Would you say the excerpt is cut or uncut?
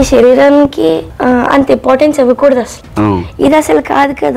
cut